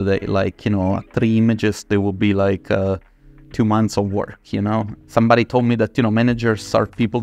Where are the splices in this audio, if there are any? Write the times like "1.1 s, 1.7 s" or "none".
1.0 s, 5.0 s